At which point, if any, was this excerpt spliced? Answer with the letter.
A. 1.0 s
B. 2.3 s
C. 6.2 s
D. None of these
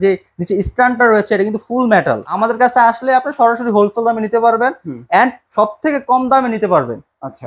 B